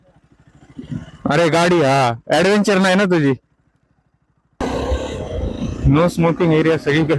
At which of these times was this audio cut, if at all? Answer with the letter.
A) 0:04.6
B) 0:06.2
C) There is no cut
A